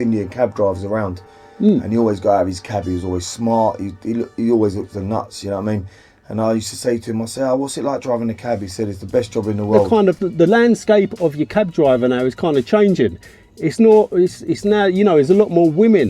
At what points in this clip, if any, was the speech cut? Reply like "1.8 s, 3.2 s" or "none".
9.8 s